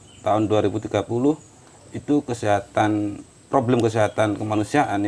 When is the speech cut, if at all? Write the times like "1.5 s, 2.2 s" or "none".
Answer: none